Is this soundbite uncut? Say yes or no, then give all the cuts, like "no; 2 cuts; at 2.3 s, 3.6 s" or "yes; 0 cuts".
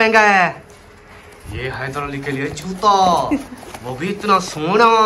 yes; 0 cuts